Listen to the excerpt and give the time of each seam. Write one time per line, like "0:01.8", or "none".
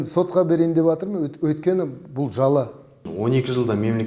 0:03.0